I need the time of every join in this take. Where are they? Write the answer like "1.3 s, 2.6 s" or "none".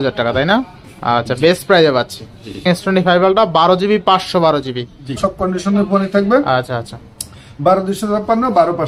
2.6 s, 5.2 s